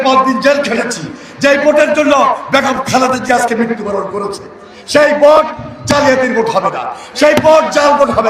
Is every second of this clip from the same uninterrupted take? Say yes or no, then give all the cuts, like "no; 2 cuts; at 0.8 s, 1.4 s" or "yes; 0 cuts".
yes; 0 cuts